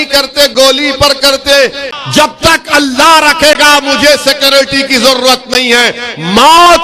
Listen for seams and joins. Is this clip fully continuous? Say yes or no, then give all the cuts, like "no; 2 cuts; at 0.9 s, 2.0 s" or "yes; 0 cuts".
no; 1 cut; at 1.9 s